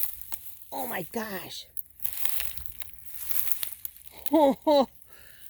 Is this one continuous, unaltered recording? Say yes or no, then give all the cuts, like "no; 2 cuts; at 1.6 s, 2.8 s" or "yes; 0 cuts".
yes; 0 cuts